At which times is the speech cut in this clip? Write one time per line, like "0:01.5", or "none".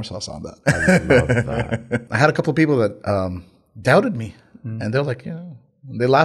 0:02.1